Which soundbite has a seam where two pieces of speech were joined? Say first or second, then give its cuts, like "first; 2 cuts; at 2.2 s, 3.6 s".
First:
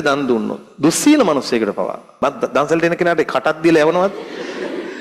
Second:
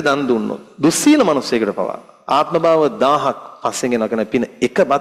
first; 1 cut; at 2.2 s